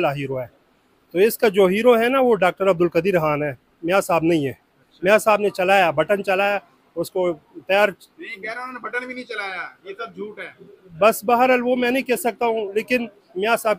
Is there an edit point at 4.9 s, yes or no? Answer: no